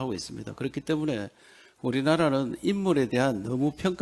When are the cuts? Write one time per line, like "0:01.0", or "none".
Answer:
none